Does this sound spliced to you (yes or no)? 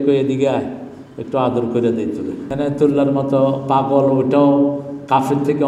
yes